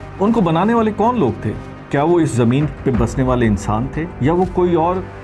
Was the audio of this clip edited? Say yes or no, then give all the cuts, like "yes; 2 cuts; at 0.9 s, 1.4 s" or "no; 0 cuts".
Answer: yes; 1 cut; at 2.7 s